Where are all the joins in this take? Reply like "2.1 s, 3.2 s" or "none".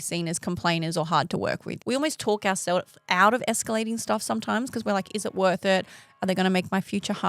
1.7 s